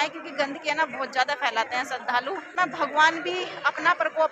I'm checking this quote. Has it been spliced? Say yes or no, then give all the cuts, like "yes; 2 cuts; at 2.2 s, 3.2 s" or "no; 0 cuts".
yes; 1 cut; at 2.5 s